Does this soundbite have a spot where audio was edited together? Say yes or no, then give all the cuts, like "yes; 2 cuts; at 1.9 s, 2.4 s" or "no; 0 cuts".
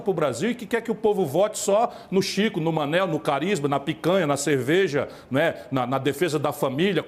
no; 0 cuts